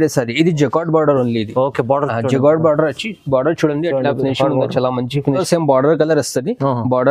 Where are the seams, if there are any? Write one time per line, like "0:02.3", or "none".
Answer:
0:05.4